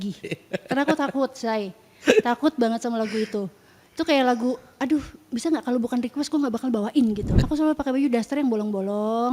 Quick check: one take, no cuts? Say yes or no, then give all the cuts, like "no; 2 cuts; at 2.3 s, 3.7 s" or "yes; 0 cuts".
no; 1 cut; at 7.3 s